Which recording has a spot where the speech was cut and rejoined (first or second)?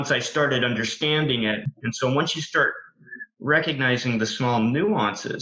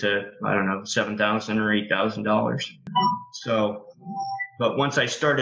second